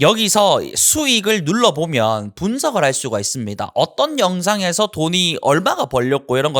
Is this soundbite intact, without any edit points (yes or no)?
yes